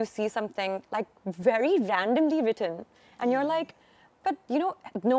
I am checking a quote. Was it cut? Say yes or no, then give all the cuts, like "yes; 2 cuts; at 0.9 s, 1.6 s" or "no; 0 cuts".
no; 0 cuts